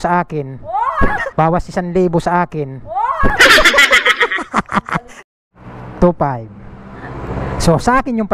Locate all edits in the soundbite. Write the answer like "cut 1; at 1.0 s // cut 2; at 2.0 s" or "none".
cut 1; at 1.1 s // cut 2; at 3.3 s // cut 3; at 5.1 s